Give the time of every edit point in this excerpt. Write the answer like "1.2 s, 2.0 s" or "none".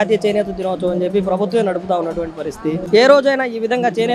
2.8 s